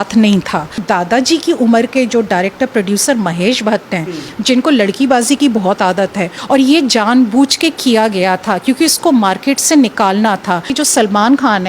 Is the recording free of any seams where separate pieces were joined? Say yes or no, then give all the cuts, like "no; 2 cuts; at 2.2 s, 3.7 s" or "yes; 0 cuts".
no; 3 cuts; at 0.8 s, 6.4 s, 10.7 s